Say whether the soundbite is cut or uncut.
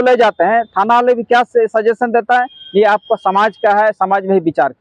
uncut